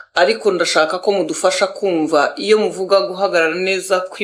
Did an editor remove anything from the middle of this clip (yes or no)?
no